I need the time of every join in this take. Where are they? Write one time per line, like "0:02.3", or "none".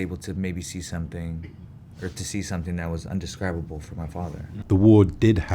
0:04.5